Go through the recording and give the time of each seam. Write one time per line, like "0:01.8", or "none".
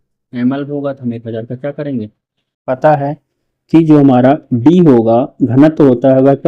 0:02.7